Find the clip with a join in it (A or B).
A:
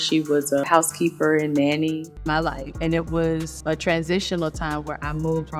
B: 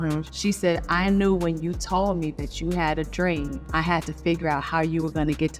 A